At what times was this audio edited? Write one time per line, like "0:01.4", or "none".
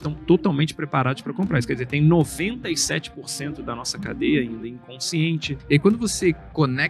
0:05.5